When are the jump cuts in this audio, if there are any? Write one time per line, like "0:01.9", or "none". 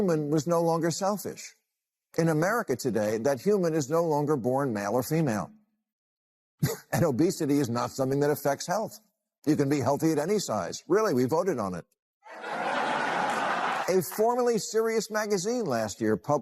0:13.8